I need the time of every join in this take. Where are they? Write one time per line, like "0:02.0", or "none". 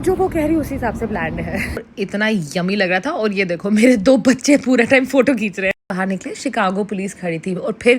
0:01.9
0:05.9